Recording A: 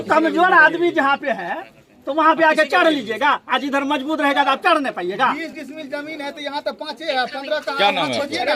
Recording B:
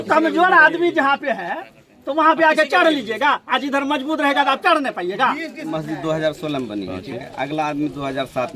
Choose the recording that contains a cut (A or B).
B